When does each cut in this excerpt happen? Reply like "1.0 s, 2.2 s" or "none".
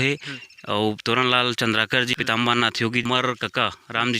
2.1 s, 3.0 s